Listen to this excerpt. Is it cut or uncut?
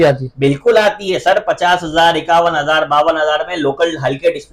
uncut